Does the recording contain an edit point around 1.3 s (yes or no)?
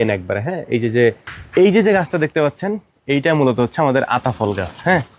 yes